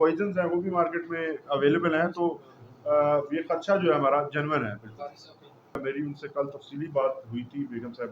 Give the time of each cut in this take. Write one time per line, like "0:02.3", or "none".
0:05.8